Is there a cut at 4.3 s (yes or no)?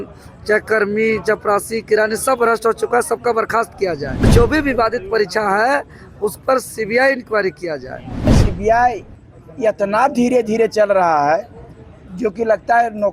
yes